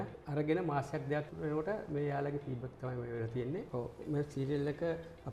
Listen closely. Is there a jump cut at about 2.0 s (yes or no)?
no